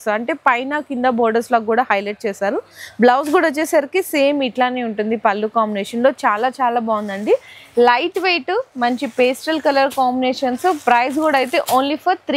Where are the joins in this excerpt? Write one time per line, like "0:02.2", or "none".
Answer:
none